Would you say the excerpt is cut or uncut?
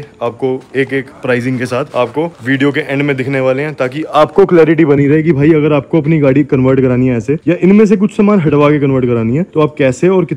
uncut